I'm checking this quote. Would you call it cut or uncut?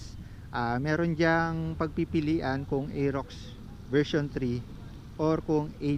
uncut